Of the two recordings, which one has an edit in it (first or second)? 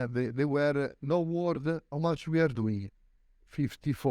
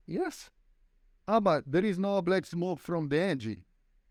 first